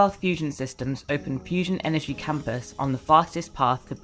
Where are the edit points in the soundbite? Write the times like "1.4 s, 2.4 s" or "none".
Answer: none